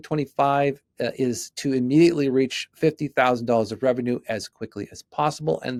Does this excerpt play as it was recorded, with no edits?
yes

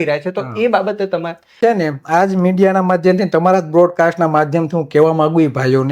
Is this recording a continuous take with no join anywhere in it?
no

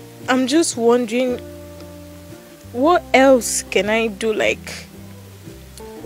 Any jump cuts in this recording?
yes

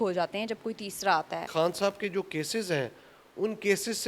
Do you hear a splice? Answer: yes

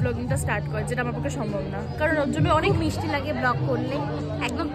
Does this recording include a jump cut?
no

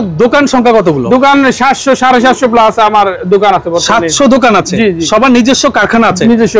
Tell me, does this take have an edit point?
no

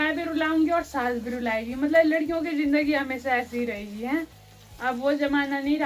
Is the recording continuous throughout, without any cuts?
yes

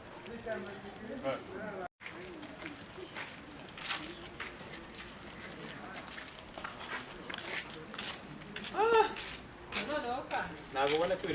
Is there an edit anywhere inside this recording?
yes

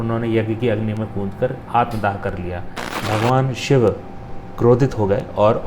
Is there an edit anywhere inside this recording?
yes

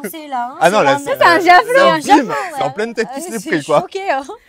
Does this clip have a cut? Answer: no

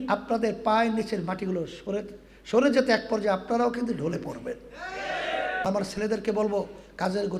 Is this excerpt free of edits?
no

